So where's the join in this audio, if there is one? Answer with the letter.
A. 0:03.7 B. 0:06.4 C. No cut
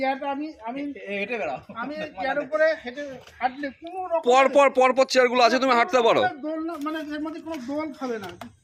C